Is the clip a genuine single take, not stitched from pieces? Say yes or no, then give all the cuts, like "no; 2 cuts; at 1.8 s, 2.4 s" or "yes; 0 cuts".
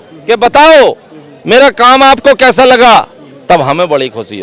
yes; 0 cuts